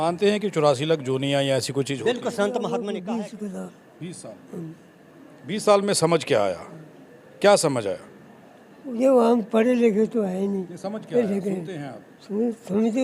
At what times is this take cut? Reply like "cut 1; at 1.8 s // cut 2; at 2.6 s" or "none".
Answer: cut 1; at 2.7 s